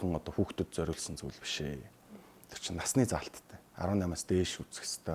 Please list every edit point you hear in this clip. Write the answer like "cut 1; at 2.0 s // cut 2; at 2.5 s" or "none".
none